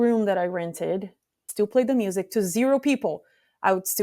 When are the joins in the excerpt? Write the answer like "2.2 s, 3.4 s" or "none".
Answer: 1.4 s